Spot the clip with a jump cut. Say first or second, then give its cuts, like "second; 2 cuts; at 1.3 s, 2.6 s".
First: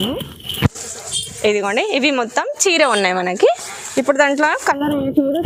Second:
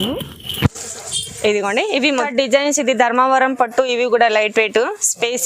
second; 1 cut; at 2.3 s